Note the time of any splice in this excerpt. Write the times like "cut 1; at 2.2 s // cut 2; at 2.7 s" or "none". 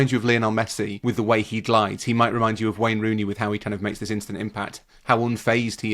cut 1; at 0.9 s